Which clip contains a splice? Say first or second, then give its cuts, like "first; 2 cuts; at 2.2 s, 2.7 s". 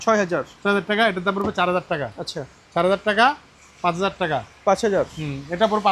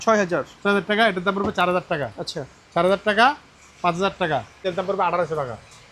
second; 1 cut; at 4.6 s